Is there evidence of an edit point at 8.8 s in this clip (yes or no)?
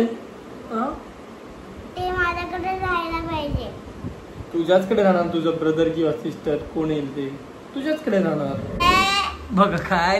yes